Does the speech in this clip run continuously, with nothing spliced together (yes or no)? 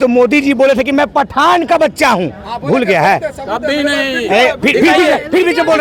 yes